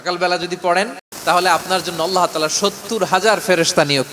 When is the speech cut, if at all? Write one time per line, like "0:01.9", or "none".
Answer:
0:01.0